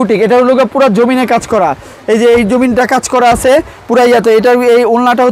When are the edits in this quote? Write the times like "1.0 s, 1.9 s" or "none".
none